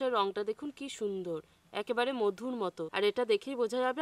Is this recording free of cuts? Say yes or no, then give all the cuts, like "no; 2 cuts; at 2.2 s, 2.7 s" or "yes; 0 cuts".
no; 1 cut; at 2.8 s